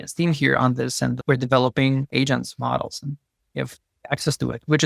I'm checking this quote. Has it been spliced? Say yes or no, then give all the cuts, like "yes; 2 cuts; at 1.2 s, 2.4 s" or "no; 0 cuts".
yes; 1 cut; at 3.5 s